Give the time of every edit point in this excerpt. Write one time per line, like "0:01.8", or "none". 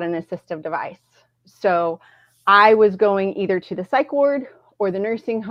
none